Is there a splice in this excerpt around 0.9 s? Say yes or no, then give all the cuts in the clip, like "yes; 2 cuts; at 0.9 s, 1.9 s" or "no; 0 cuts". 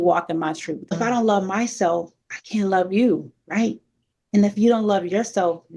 yes; 1 cut; at 0.9 s